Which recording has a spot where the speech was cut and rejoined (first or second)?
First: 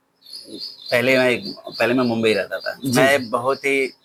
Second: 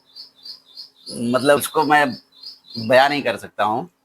second